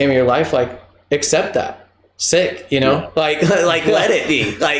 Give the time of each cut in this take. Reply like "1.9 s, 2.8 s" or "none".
none